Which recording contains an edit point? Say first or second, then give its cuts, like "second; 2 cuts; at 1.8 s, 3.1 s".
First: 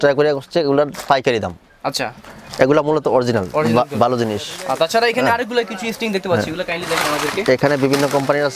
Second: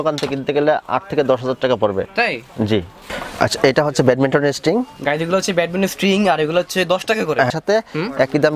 second; 2 cuts; at 3.2 s, 7.5 s